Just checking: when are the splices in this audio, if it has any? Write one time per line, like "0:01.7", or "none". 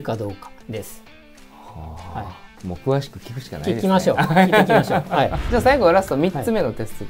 0:05.4